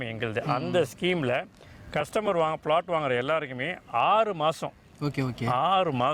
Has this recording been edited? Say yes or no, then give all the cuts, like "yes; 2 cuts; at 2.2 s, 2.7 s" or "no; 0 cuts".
no; 0 cuts